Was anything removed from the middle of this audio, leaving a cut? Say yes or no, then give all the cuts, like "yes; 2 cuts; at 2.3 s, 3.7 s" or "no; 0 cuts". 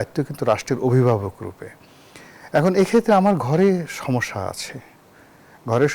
no; 0 cuts